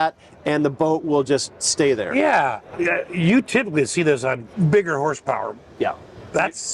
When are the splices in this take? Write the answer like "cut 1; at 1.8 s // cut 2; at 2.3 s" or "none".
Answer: cut 1; at 2.7 s // cut 2; at 4.5 s